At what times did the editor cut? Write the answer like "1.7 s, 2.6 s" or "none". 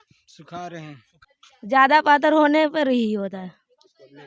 1.1 s